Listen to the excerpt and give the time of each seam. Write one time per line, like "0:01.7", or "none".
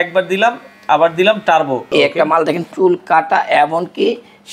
0:01.9